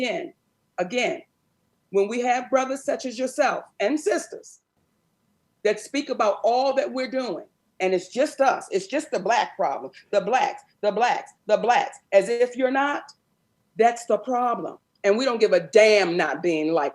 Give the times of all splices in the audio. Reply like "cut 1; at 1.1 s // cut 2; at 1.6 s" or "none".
cut 1; at 14.7 s